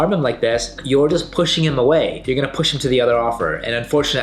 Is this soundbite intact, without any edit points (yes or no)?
yes